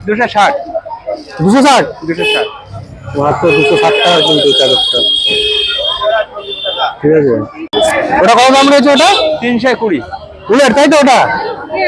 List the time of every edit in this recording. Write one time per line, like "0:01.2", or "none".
0:07.7